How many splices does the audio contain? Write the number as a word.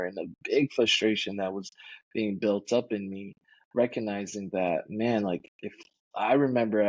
zero